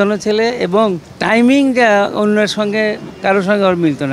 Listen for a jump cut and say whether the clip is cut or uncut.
cut